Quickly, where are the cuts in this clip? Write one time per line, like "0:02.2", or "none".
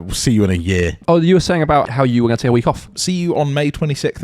0:01.0
0:01.9
0:03.0